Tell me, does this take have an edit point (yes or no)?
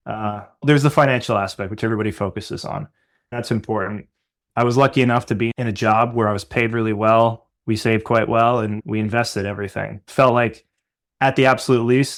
no